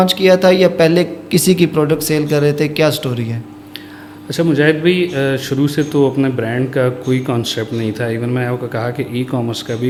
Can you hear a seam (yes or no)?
no